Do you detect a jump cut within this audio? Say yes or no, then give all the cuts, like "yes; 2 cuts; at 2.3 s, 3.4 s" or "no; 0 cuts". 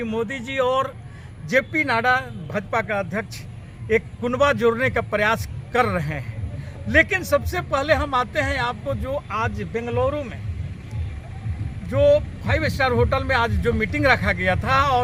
no; 0 cuts